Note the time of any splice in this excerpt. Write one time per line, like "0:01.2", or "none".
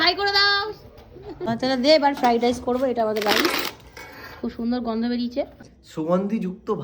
0:01.5
0:05.6